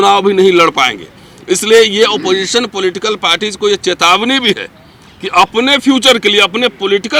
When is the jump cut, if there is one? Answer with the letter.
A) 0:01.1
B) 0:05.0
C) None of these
C